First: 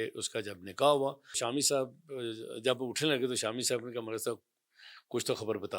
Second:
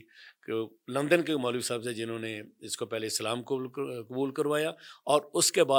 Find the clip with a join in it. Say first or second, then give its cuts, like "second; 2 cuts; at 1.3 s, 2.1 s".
first; 1 cut; at 1.4 s